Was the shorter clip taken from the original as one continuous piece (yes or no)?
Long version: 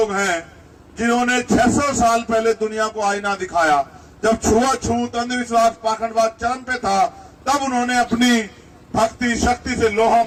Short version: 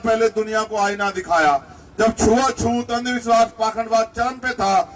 yes